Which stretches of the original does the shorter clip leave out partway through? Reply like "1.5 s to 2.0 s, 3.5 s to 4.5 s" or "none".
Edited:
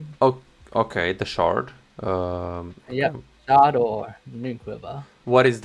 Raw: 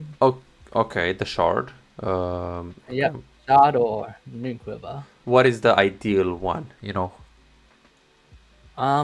none